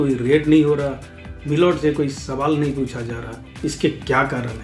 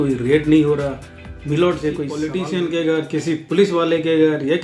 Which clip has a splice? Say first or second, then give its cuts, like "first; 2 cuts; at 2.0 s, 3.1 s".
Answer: second; 1 cut; at 2.3 s